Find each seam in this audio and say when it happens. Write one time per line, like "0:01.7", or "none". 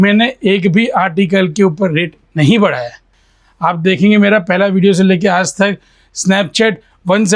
none